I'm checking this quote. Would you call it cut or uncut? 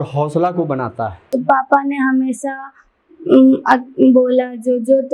cut